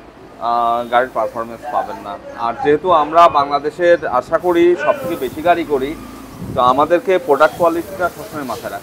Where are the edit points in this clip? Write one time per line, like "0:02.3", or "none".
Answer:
none